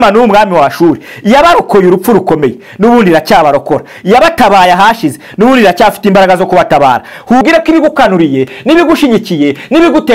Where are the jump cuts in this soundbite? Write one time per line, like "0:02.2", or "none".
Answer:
0:07.4